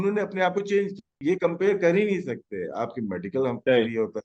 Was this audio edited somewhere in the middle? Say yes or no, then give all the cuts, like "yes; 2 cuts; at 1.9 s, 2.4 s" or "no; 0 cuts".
yes; 1 cut; at 1.1 s